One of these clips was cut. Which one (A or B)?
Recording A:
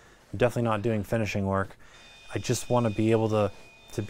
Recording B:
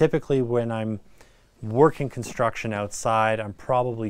A